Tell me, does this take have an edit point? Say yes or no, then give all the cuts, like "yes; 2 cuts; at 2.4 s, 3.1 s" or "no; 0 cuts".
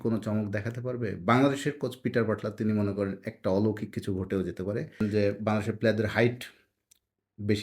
yes; 1 cut; at 5.0 s